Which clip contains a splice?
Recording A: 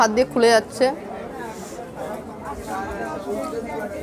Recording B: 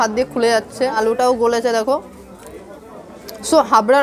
B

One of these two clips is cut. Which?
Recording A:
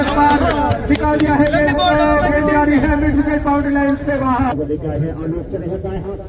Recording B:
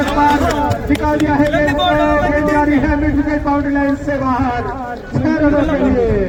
A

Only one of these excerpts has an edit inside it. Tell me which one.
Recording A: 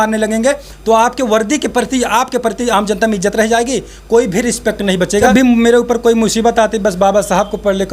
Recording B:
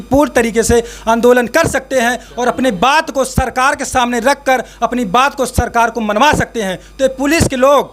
A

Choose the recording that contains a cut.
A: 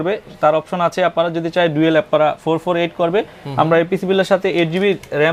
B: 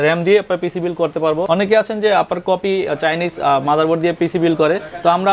B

